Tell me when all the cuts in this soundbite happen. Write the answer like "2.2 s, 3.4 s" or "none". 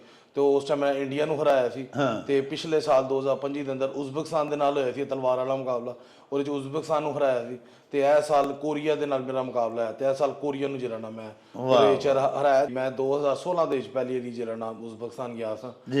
12.7 s